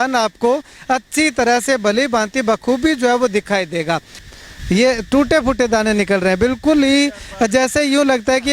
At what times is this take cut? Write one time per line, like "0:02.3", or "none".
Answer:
0:04.2